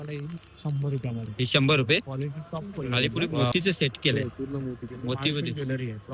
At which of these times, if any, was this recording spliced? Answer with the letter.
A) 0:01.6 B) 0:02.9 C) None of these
B